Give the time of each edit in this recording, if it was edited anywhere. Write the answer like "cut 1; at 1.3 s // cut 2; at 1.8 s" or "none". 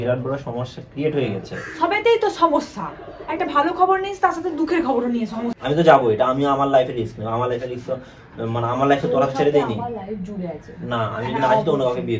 cut 1; at 5.5 s